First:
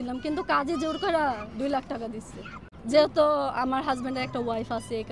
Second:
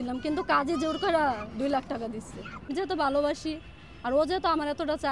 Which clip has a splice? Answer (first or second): second